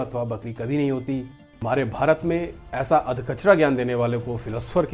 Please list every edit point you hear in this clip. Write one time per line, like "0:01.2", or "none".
0:01.4